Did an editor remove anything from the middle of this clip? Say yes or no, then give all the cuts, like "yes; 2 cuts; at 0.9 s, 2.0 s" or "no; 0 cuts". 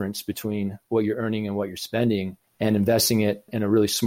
yes; 1 cut; at 2.4 s